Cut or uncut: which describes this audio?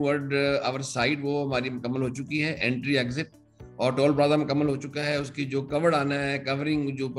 uncut